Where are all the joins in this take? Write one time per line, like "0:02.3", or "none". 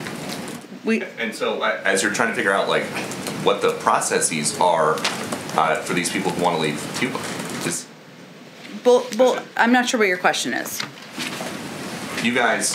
none